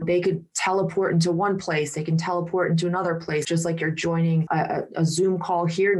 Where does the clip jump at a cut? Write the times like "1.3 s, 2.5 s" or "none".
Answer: 3.5 s